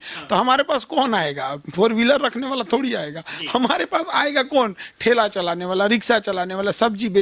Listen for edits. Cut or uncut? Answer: uncut